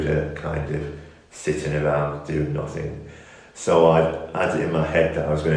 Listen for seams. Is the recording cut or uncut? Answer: uncut